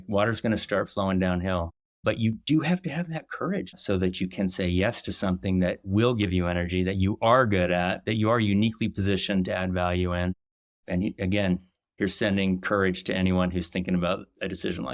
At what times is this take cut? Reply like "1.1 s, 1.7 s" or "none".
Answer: 3.7 s, 10.7 s